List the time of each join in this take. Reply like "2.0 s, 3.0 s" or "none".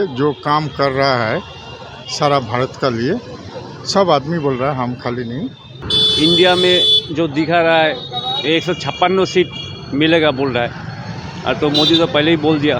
5.8 s